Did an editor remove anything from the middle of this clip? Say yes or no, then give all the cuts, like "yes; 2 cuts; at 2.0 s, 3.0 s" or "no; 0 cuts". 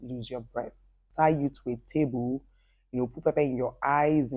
yes; 1 cut; at 1.0 s